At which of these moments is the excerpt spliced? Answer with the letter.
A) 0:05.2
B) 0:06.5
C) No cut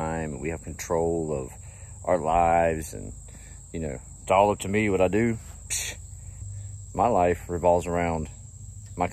B